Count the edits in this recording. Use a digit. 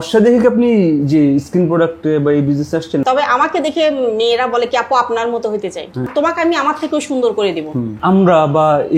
3